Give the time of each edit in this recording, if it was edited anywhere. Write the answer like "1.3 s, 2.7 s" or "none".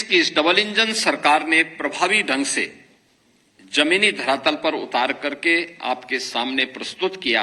1.0 s